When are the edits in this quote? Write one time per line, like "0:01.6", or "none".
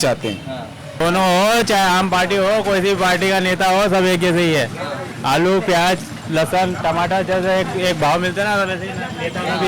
0:01.0